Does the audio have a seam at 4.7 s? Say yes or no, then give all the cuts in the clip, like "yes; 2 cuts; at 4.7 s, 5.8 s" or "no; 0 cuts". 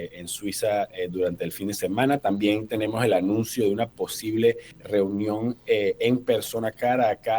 yes; 1 cut; at 4.7 s